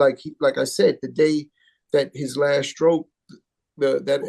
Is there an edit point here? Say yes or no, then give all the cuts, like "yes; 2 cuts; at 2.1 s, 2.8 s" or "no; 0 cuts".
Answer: no; 0 cuts